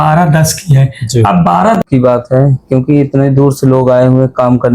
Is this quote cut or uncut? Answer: cut